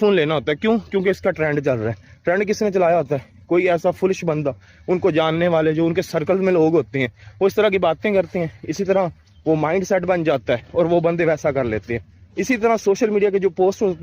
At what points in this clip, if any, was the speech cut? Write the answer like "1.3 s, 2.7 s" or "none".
none